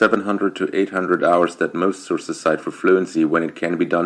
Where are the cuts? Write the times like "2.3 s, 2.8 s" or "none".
none